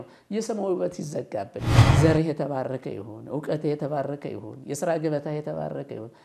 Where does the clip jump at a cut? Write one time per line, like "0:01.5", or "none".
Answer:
0:01.8